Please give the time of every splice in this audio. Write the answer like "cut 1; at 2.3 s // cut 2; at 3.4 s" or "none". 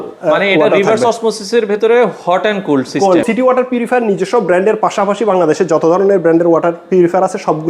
cut 1; at 3.2 s